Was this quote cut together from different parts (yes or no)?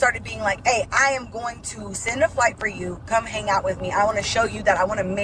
no